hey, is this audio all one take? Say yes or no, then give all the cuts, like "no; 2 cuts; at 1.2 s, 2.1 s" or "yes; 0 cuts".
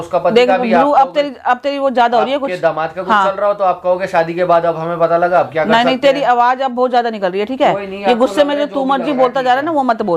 yes; 0 cuts